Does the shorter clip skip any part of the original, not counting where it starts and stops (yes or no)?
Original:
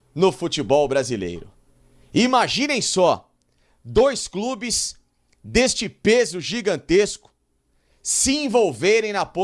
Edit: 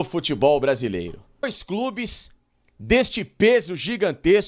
yes